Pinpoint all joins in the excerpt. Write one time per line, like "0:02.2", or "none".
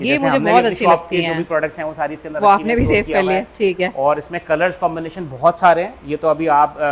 none